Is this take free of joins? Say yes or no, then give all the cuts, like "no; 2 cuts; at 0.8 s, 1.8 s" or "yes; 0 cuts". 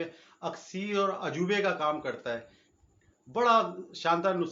yes; 0 cuts